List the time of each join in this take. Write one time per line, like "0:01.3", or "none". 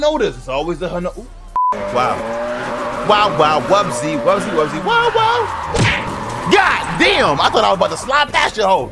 0:01.7